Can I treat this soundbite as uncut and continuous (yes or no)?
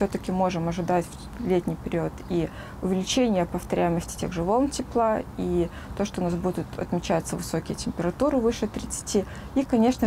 yes